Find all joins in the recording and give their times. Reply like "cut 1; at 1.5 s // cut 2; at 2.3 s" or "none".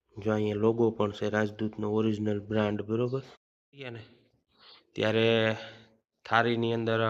cut 1; at 4.0 s